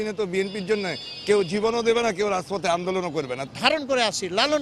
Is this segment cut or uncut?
cut